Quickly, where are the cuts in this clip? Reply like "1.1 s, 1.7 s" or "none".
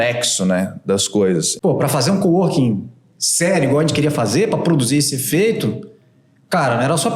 1.5 s